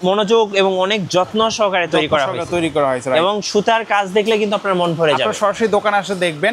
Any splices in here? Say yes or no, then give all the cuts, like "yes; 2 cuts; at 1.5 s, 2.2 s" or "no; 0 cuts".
no; 0 cuts